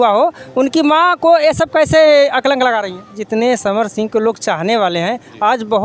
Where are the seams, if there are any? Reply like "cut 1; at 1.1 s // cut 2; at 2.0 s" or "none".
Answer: cut 1; at 3.2 s